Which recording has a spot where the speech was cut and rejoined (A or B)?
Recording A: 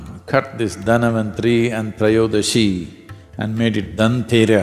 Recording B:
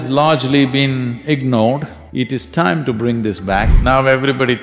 B